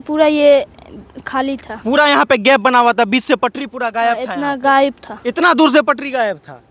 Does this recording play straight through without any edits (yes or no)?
yes